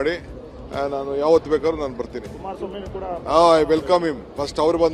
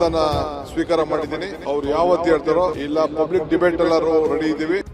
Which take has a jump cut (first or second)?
second